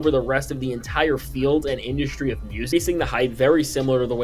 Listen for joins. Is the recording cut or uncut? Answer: cut